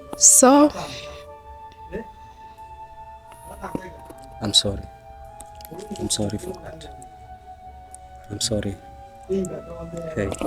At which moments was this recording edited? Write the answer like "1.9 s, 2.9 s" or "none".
none